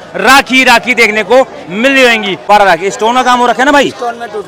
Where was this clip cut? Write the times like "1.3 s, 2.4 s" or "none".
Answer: 2.3 s